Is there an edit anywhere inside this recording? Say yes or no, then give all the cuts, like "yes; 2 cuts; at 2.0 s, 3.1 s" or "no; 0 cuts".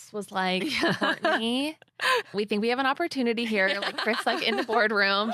yes; 1 cut; at 2.3 s